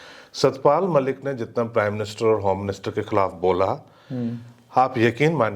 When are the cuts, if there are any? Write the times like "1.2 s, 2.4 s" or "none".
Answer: none